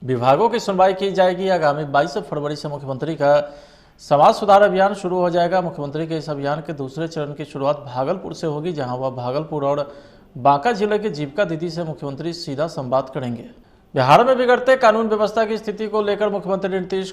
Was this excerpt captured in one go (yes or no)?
no